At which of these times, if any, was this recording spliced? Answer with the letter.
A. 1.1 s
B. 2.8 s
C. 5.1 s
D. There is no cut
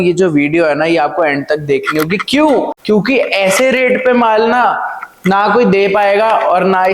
B